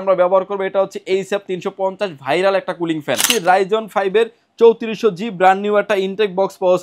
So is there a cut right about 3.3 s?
yes; 1 cut; at 3.3 s

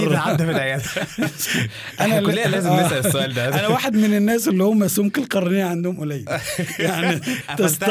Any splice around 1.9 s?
yes; 1 cut; at 1.9 s

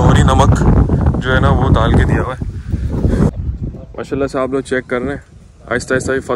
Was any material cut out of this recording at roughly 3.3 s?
yes; 1 cut; at 3.3 s

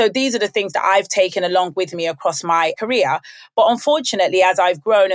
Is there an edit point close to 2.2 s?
no; 0 cuts

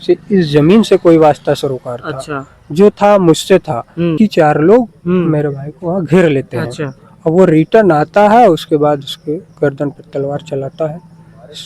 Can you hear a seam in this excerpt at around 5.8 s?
no; 1 cut; at 4.1 s

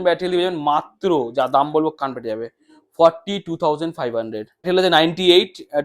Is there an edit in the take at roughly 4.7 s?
yes; 1 cut; at 4.7 s

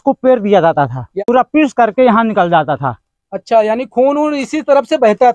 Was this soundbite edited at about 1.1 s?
yes; 1 cut; at 1.1 s

